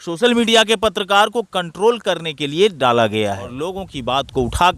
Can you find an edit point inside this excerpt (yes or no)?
yes